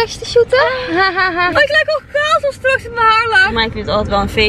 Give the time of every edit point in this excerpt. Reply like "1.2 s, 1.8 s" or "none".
1.5 s, 3.5 s

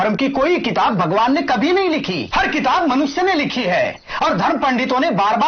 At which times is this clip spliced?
2.2 s

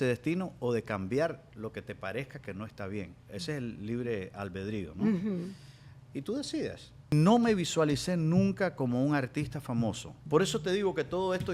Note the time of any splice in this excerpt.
7.1 s, 10.1 s

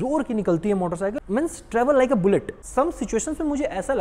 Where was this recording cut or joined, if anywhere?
1.2 s, 2.6 s

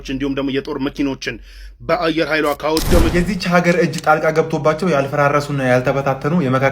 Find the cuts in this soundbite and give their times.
3.1 s

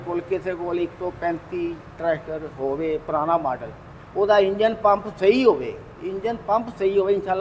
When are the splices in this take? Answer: none

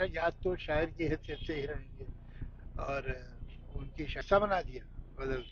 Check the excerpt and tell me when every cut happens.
4.2 s

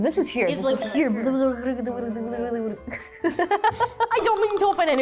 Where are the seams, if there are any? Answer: 4.1 s

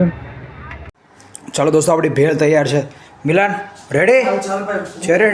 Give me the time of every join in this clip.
1.0 s

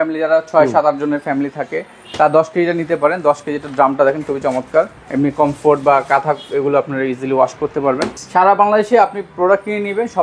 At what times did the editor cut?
5.0 s, 8.1 s

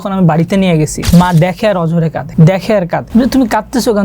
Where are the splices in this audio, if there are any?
1.0 s, 2.2 s, 3.1 s

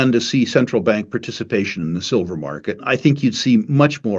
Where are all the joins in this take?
2.8 s

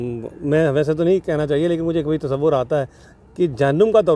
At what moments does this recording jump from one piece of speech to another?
none

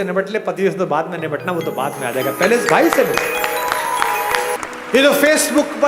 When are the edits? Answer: 4.6 s

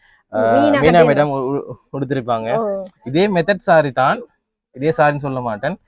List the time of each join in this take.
none

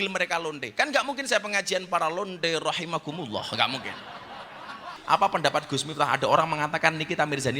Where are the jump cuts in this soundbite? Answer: 4.9 s

